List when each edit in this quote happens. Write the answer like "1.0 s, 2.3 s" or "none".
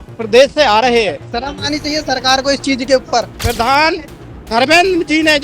3.4 s